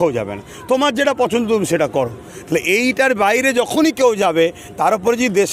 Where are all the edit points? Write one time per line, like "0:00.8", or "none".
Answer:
none